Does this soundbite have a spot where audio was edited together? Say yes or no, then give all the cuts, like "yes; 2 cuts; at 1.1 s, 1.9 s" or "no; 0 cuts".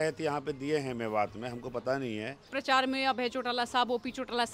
yes; 1 cut; at 2.4 s